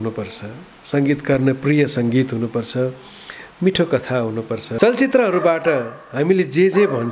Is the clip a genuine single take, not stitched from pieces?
no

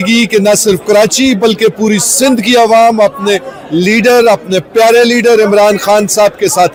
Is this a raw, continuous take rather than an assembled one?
yes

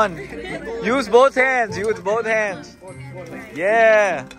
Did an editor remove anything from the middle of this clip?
no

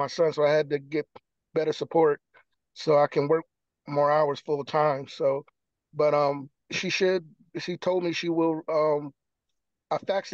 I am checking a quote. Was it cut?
no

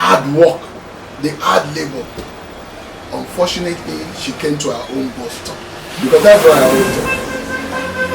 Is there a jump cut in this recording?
yes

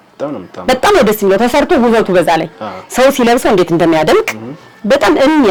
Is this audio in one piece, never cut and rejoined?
yes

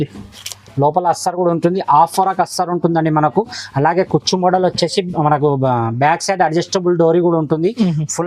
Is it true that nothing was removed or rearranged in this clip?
yes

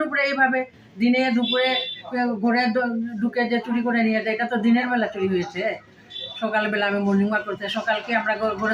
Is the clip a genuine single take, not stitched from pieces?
yes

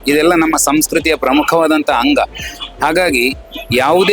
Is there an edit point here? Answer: no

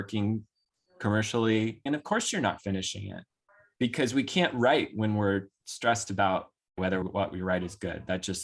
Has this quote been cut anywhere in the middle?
yes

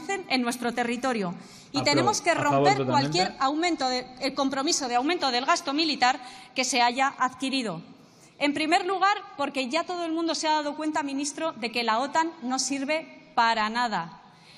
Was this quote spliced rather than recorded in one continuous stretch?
no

